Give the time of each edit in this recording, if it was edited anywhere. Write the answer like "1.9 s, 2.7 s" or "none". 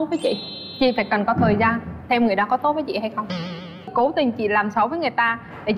3.9 s